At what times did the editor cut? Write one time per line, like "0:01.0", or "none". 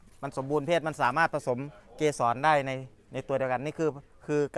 none